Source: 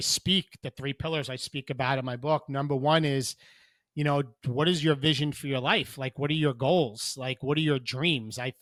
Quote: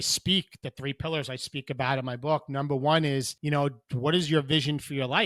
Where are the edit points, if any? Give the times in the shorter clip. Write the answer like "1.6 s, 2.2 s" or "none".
3.3 s